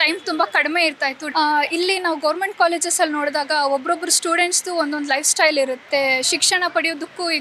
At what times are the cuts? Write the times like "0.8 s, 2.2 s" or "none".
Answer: 1.2 s, 5.9 s